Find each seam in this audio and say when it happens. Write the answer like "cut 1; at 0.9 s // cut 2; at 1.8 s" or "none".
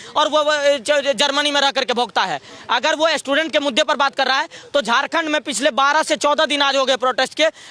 none